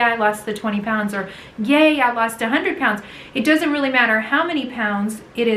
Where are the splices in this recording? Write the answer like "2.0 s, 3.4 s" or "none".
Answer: none